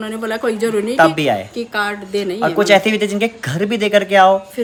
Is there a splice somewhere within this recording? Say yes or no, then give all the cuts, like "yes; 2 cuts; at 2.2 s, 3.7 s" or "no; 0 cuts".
no; 0 cuts